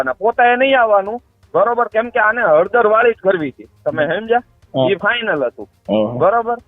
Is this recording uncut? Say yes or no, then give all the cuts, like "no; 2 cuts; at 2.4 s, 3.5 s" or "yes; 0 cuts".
yes; 0 cuts